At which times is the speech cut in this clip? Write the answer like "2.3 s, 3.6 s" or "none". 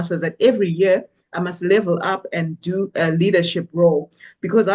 none